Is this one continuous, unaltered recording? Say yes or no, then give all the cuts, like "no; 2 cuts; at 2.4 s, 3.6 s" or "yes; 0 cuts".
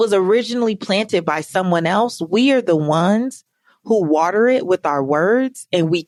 yes; 0 cuts